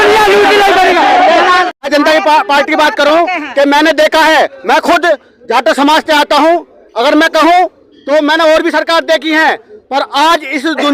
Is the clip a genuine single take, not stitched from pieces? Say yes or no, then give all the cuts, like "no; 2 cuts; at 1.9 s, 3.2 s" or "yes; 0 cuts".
no; 1 cut; at 1.7 s